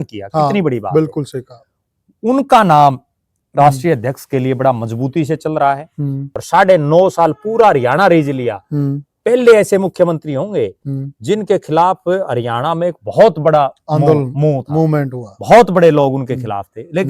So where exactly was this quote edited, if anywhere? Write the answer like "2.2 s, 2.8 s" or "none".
6.3 s